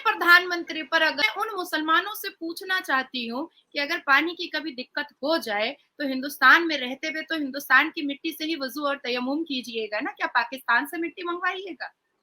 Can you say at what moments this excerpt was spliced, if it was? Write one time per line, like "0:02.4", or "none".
0:01.2

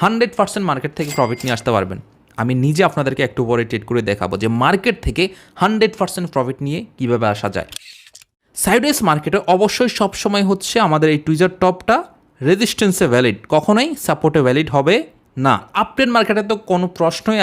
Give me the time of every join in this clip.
0:08.0
0:15.7

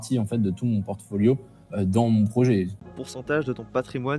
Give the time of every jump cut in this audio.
0:02.9

